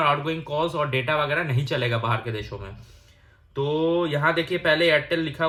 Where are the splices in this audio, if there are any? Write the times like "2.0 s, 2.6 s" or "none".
none

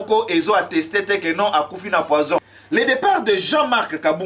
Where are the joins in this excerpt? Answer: 2.5 s

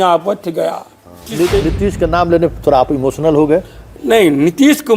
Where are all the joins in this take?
1.3 s

